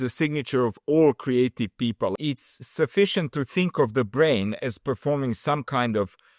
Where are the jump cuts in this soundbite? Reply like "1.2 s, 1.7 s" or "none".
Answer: 2.1 s